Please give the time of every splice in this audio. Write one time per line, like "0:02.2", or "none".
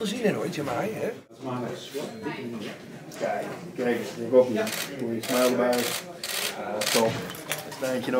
none